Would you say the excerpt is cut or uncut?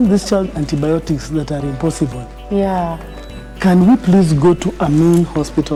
uncut